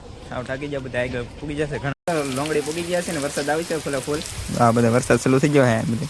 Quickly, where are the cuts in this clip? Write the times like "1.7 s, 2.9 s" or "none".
2.0 s

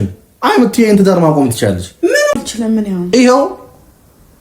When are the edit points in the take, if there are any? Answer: 2.4 s

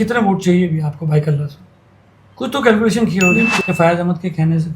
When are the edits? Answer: 3.6 s

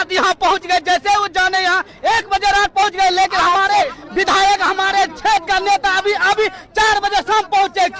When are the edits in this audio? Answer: none

